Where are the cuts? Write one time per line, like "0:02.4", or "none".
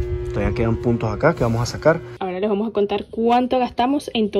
0:02.1